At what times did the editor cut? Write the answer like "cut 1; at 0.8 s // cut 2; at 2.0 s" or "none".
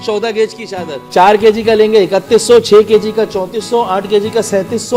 cut 1; at 1.0 s